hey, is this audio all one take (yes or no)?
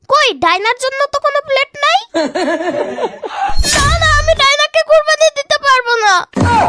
no